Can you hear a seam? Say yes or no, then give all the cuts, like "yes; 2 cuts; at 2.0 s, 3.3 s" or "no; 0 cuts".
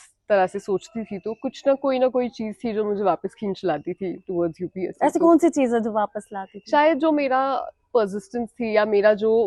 no; 0 cuts